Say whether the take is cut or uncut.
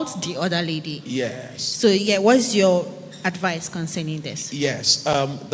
uncut